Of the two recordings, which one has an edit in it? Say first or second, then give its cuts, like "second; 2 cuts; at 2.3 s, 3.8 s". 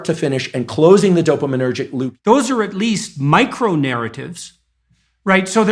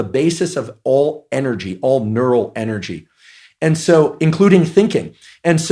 first; 1 cut; at 2.0 s